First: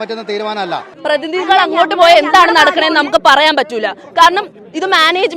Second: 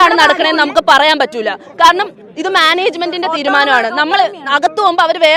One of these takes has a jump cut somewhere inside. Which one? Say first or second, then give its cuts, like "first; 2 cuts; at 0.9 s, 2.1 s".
first; 1 cut; at 0.9 s